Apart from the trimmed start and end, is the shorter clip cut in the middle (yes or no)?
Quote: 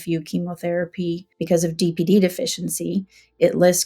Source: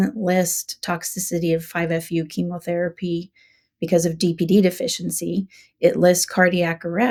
yes